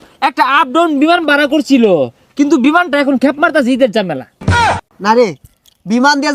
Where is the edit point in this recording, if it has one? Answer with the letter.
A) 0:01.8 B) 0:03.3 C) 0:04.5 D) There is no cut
D